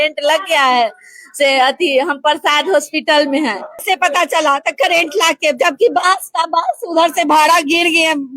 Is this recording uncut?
no; 1 cut; at 3.8 s

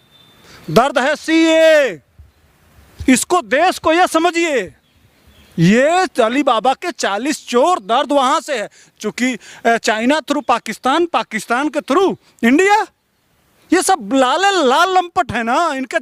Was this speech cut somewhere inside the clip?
no; 0 cuts

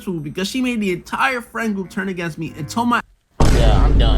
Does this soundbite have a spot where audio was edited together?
yes; 1 cut; at 3.2 s

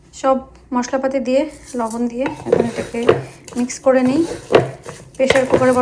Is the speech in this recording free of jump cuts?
yes; 0 cuts

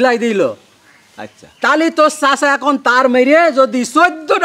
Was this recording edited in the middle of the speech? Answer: no; 0 cuts

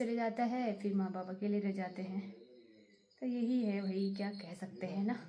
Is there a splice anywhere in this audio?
no; 0 cuts

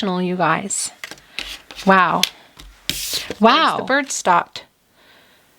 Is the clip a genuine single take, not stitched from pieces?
no; 1 cut; at 3.8 s

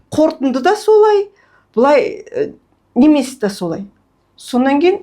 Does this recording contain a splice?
no; 0 cuts

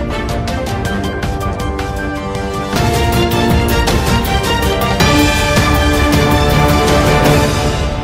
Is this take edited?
no; 0 cuts

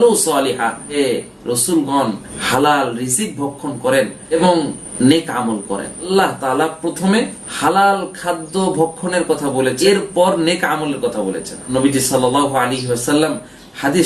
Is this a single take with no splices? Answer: no; 5 cuts; at 1.0 s, 6.1 s, 7.4 s, 9.8 s, 11.6 s

